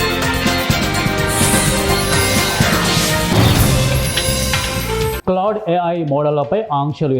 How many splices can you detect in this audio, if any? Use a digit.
1